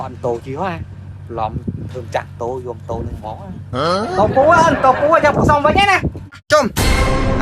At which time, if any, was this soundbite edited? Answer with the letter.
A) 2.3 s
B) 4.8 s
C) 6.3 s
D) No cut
C